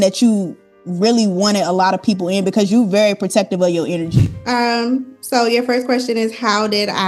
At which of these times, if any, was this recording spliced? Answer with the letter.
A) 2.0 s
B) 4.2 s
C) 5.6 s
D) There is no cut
B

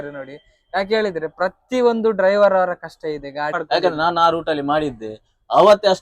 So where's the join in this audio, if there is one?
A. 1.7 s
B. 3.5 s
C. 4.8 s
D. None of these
B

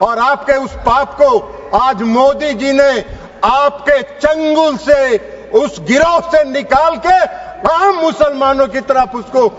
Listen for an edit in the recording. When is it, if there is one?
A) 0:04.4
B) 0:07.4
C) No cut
C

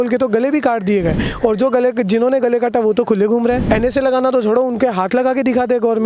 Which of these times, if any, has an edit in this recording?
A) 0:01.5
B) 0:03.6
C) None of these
B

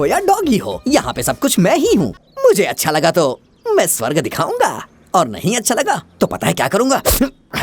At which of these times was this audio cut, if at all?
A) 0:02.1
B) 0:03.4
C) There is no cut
A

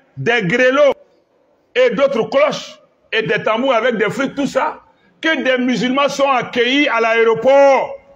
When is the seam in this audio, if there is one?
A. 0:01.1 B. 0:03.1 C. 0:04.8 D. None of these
A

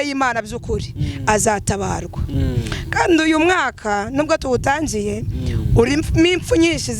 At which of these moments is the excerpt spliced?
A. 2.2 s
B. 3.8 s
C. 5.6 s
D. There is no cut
A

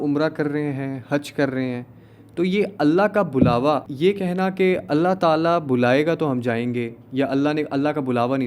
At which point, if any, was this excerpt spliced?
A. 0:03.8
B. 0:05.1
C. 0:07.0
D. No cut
A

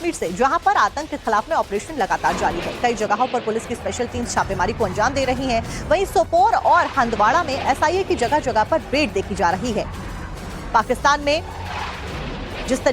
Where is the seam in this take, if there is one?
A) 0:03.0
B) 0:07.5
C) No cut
B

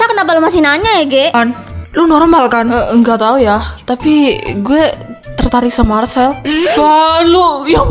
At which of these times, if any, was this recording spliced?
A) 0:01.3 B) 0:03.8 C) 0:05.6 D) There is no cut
A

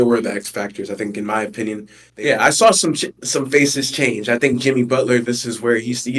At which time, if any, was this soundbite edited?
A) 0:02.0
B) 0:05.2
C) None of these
A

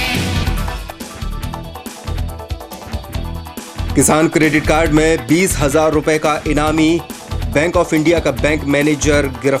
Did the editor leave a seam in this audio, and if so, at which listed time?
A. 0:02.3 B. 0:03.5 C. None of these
B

